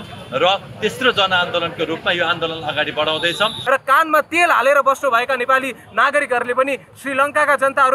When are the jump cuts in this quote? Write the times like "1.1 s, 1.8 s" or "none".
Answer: 3.6 s